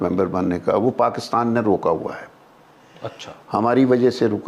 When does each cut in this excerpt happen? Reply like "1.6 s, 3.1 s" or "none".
none